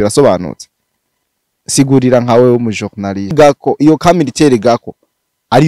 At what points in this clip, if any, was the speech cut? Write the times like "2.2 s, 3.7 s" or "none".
3.3 s